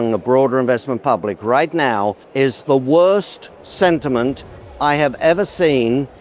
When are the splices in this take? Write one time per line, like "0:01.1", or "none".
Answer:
0:02.4